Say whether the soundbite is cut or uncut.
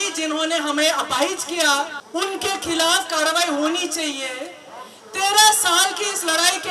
uncut